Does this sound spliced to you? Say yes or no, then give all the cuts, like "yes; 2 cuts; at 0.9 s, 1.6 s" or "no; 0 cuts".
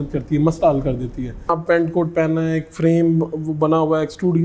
yes; 1 cut; at 1.5 s